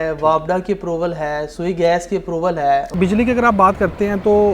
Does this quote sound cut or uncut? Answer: cut